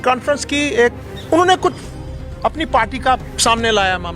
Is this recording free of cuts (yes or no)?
no